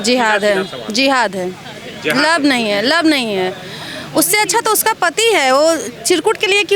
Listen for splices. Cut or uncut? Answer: uncut